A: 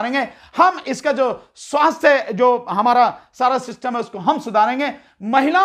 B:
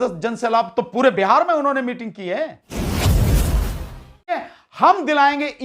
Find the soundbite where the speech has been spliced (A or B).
B